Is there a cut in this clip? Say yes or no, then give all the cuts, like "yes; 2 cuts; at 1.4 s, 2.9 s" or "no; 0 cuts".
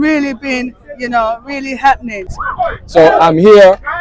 yes; 1 cut; at 2.3 s